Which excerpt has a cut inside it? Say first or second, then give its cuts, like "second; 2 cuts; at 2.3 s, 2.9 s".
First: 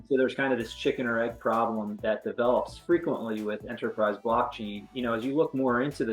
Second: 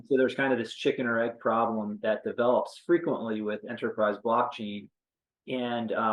first; 1 cut; at 4.9 s